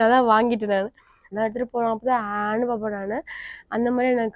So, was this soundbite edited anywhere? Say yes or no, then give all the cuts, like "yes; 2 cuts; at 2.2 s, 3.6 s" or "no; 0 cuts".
yes; 1 cut; at 1.2 s